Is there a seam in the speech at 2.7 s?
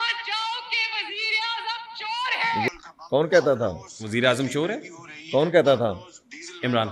yes; 1 cut; at 2.7 s

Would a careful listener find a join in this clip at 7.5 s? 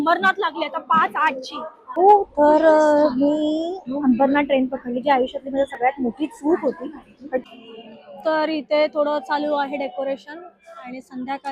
yes; 2 cuts; at 2.0 s, 7.5 s

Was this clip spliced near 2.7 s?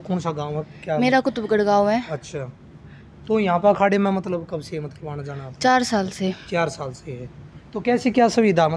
no; 0 cuts

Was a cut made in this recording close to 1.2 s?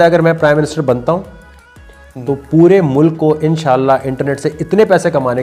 no; 0 cuts

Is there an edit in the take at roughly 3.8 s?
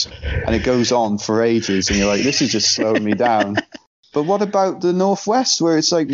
yes; 1 cut; at 3.8 s

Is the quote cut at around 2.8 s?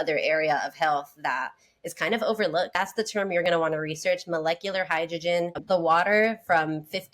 yes; 2 cuts; at 2.8 s, 5.6 s

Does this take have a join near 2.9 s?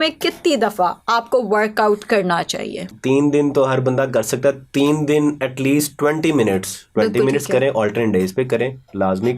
yes; 2 cuts; at 2.9 s, 6.8 s

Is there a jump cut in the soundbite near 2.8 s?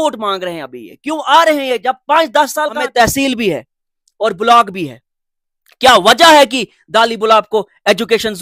yes; 1 cut; at 2.8 s

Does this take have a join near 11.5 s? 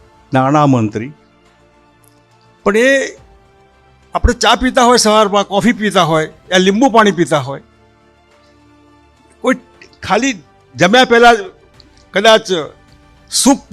no; 2 cuts; at 1.2 s, 2.6 s

